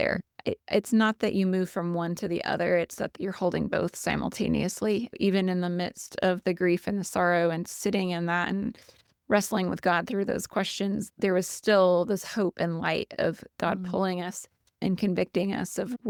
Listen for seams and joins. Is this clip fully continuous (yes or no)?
yes